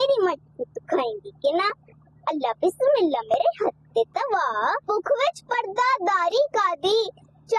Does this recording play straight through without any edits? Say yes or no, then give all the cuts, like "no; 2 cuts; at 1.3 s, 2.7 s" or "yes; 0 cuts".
no; 1 cut; at 4.8 s